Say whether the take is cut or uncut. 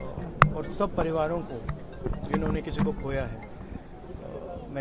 uncut